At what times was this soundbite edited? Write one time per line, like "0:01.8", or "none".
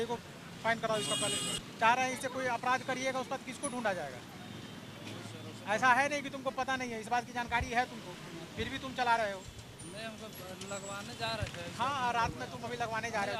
0:01.6